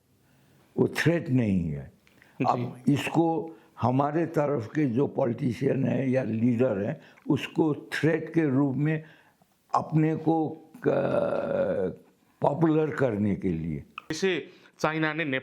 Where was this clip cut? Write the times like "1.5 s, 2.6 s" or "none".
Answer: 14.2 s

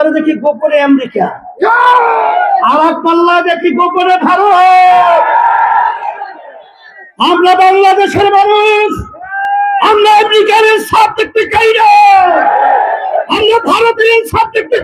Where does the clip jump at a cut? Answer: none

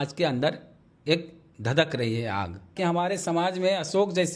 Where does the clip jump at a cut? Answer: 2.7 s

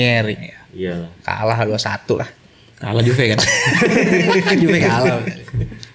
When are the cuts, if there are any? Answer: none

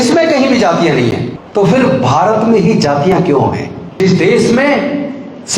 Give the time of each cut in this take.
1.3 s, 4.0 s

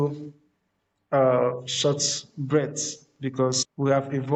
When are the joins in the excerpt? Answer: none

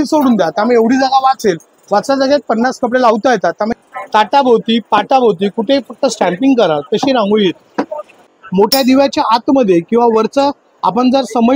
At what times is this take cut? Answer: 3.8 s, 8.3 s

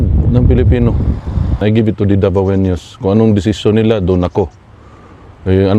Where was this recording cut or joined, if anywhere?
1.6 s

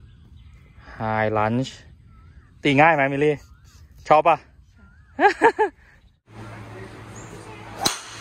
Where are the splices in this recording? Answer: 6.3 s

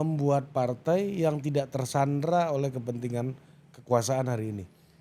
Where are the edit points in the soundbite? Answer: none

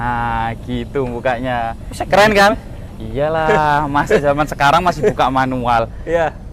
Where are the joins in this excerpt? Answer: none

